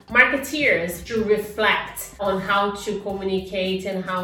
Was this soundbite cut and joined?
yes; 2 cuts; at 1.0 s, 2.1 s

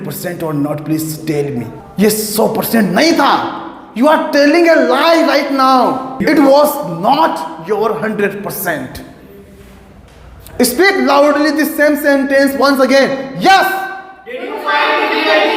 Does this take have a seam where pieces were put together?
yes; 2 cuts; at 1.8 s, 6.1 s

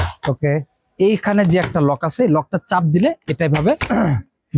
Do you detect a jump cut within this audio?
no; 0 cuts

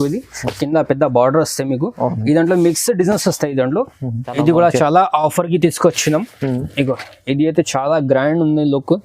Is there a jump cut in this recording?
yes; 1 cut; at 4.3 s

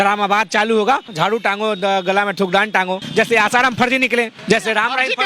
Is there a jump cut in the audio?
yes; 3 cuts; at 1.1 s, 3.0 s, 4.4 s

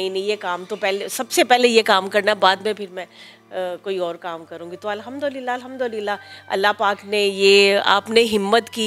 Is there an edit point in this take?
no; 0 cuts

